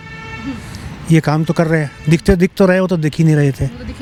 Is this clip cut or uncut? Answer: uncut